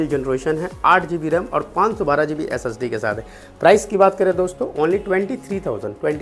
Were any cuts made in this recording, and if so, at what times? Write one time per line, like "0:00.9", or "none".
none